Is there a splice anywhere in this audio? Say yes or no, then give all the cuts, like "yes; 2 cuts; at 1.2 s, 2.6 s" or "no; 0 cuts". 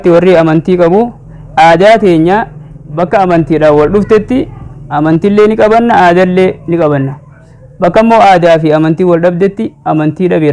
no; 0 cuts